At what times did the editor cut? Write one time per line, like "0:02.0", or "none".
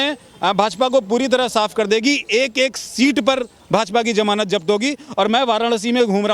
none